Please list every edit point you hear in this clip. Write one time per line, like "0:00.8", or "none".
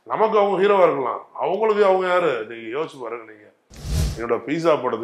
0:04.0